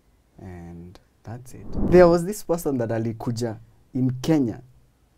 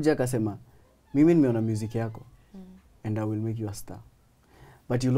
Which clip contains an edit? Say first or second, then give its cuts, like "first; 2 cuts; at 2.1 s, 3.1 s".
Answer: first; 1 cut; at 1.9 s